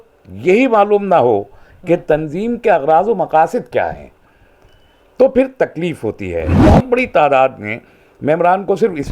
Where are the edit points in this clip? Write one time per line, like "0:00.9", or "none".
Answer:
0:06.6